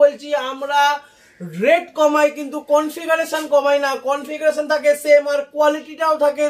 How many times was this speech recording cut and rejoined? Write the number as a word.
zero